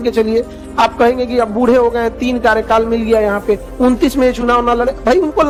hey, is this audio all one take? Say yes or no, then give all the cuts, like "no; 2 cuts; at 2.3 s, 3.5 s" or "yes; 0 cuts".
yes; 0 cuts